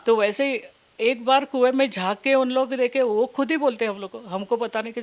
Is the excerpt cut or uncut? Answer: uncut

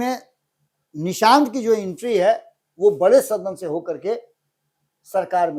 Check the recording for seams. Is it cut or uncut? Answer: uncut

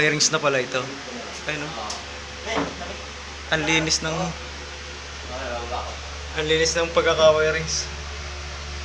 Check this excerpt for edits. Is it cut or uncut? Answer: uncut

